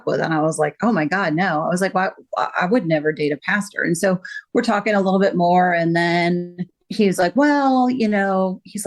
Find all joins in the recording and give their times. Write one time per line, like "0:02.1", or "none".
none